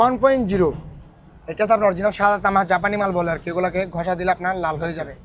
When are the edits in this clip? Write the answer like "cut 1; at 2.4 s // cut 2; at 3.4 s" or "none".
none

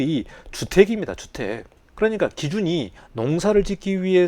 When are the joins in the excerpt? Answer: cut 1; at 3.0 s

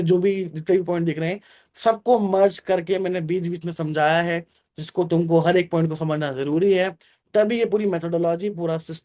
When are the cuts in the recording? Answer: none

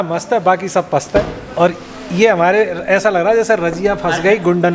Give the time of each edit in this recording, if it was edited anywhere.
none

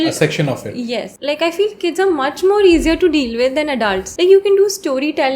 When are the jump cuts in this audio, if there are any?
cut 1; at 1.1 s // cut 2; at 4.0 s

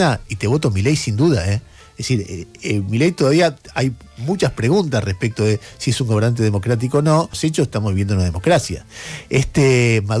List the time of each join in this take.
cut 1; at 7.3 s

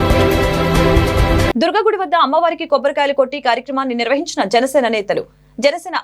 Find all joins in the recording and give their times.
cut 1; at 1.2 s

